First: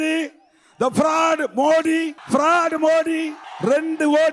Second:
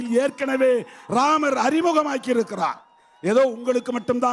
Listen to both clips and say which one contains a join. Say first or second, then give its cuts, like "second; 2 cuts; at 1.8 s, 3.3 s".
first; 2 cuts; at 2.2 s, 3.4 s